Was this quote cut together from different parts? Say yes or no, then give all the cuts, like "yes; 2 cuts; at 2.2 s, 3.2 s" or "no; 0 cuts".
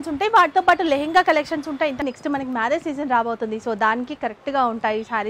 yes; 1 cut; at 2.0 s